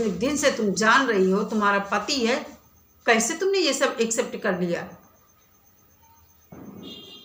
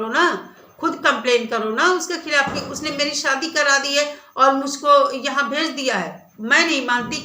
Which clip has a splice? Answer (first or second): second